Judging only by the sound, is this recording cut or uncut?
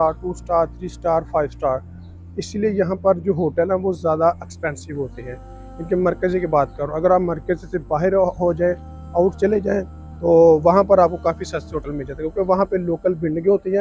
uncut